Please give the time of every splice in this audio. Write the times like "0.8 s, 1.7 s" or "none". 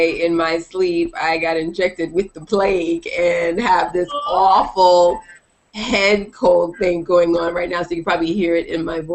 1.9 s